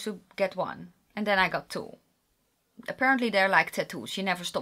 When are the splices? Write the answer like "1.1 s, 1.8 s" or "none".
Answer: none

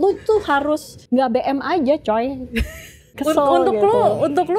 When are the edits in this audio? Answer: 0.9 s, 3.1 s

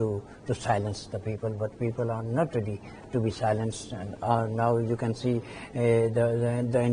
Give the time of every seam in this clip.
none

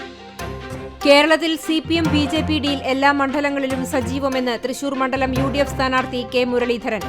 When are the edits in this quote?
1.0 s

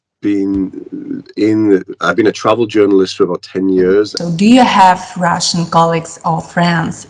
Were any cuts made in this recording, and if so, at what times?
4.2 s

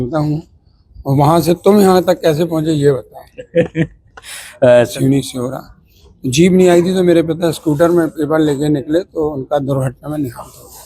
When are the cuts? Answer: 4.9 s

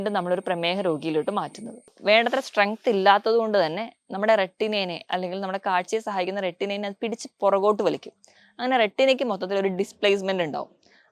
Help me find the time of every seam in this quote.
1.9 s

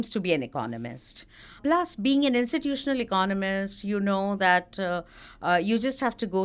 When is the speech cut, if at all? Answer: none

